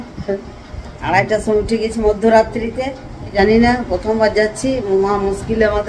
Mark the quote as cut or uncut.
cut